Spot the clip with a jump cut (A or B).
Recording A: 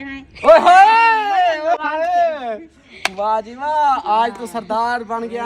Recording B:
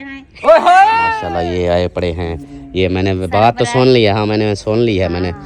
B